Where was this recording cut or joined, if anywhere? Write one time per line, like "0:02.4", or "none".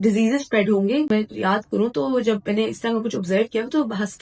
0:01.1